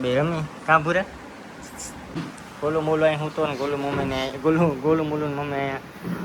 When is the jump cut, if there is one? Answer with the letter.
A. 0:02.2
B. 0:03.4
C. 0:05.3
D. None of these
A